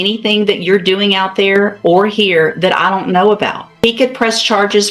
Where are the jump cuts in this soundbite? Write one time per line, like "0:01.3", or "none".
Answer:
0:03.7